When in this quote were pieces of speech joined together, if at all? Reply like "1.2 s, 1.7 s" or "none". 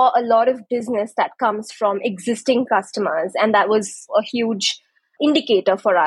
4.1 s, 5.2 s